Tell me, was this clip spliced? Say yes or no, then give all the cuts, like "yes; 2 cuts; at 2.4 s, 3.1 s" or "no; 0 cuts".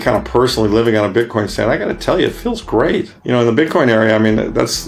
yes; 1 cut; at 3.1 s